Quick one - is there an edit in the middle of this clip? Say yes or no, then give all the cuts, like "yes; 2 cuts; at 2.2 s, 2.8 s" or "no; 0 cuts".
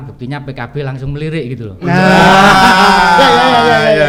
no; 0 cuts